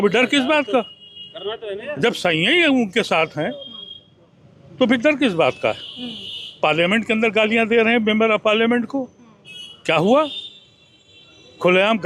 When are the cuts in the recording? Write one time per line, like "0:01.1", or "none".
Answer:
none